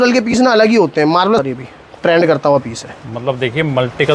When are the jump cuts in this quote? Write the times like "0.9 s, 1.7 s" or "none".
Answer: 1.4 s